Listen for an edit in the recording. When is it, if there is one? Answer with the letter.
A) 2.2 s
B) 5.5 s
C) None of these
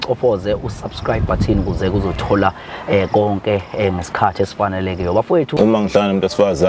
B